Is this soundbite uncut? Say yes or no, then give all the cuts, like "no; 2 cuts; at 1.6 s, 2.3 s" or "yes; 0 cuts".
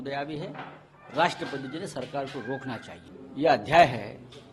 no; 1 cut; at 2.9 s